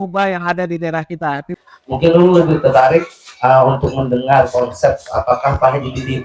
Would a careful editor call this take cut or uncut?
cut